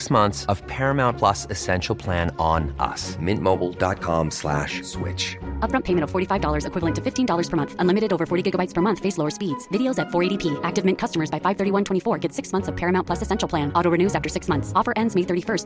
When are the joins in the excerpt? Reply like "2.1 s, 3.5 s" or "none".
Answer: none